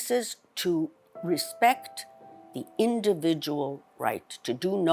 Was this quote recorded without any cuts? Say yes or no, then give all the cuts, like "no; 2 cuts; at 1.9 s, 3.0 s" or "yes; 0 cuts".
no; 1 cut; at 1.1 s